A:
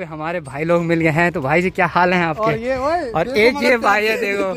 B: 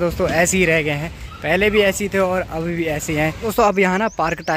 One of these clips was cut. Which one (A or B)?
B